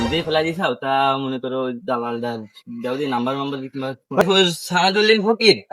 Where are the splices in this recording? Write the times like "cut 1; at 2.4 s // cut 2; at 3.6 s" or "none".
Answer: cut 1; at 4.2 s